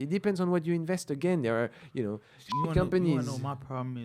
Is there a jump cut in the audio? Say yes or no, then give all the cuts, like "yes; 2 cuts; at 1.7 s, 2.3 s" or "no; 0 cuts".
no; 0 cuts